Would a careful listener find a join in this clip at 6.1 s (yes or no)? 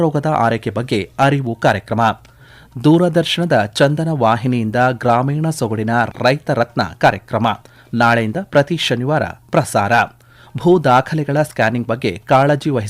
yes